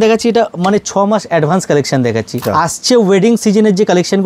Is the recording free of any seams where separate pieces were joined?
no; 1 cut; at 2.4 s

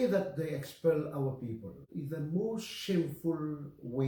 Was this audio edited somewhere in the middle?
no; 0 cuts

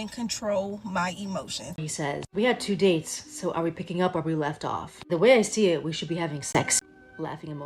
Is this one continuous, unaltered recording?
no; 2 cuts; at 1.9 s, 6.7 s

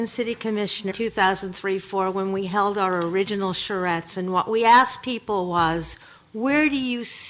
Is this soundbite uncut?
no; 1 cut; at 0.9 s

